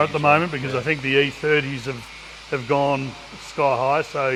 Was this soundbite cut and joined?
no; 0 cuts

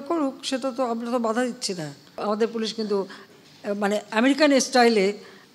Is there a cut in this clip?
yes; 1 cut; at 2.1 s

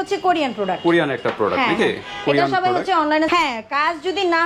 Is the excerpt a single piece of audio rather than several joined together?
no; 1 cut; at 3.3 s

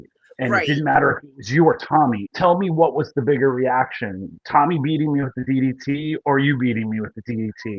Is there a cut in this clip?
yes; 1 cut; at 2.3 s

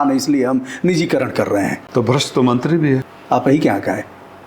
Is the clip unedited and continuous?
no; 2 cuts; at 1.8 s, 3.1 s

